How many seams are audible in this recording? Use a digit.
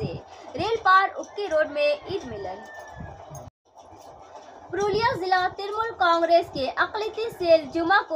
1